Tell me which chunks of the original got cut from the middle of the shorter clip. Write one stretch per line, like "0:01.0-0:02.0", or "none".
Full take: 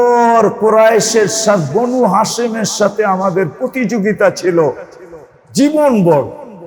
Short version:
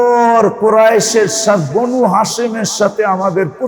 none